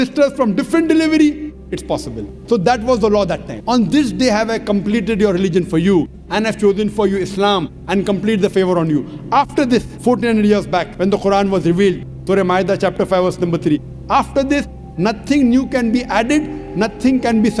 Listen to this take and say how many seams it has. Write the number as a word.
three